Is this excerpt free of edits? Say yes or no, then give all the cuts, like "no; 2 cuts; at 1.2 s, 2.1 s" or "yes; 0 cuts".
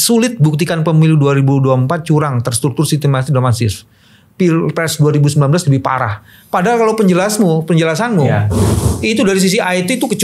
yes; 0 cuts